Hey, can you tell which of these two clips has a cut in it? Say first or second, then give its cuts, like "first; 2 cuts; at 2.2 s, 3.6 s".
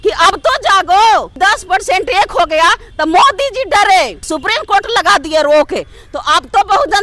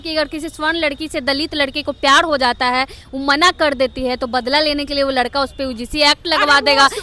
first; 2 cuts; at 1.3 s, 4.2 s